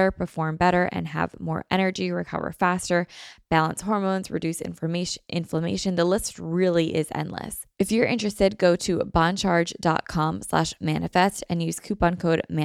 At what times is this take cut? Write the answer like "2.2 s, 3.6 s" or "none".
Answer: 7.6 s